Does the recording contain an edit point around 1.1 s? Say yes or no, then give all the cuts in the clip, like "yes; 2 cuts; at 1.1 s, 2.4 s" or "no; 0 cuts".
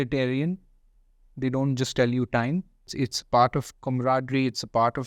no; 1 cut; at 2.9 s